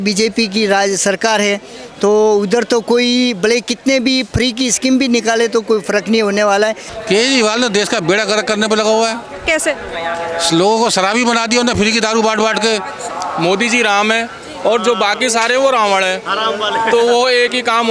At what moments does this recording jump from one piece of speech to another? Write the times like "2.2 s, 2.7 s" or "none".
6.9 s, 13.1 s